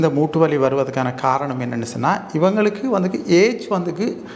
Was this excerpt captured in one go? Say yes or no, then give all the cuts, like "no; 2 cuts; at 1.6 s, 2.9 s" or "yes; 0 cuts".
yes; 0 cuts